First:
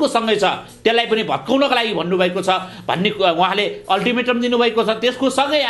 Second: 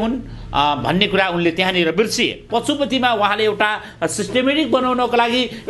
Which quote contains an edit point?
second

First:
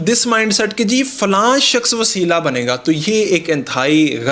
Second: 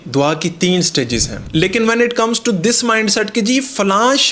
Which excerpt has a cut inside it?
second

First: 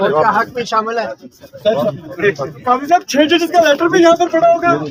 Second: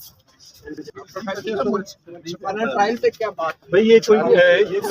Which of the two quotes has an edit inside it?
second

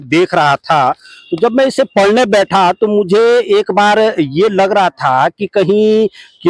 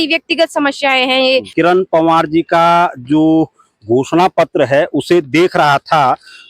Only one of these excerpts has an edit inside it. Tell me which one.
second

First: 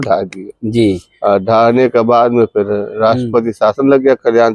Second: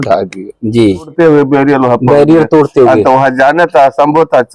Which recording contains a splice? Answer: second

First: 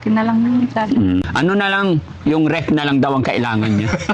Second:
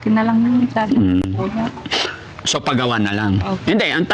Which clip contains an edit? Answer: first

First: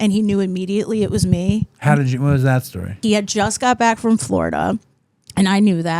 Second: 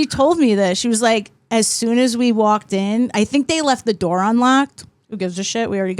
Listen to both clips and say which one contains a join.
first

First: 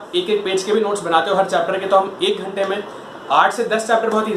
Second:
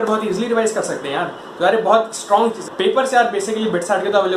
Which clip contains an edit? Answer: second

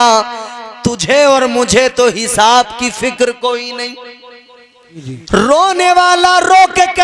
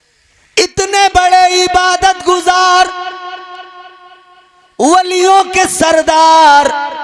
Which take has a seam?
first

